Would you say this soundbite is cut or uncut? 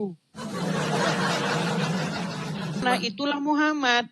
cut